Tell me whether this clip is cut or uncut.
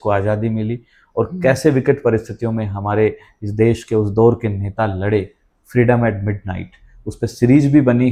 uncut